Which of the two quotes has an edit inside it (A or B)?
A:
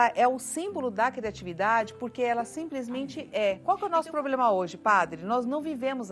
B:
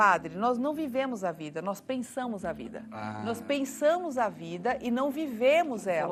A